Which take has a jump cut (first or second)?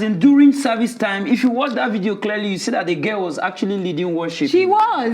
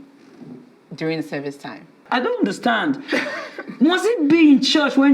second